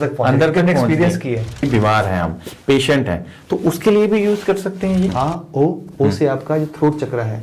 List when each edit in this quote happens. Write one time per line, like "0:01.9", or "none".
0:01.6
0:05.1